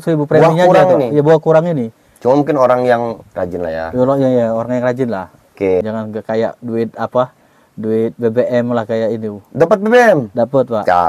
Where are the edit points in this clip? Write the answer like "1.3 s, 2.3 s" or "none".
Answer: 5.8 s